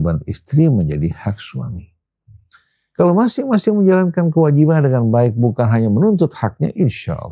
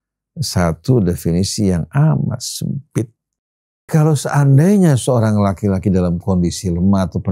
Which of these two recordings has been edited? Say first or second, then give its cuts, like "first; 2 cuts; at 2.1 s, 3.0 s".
second; 1 cut; at 3.9 s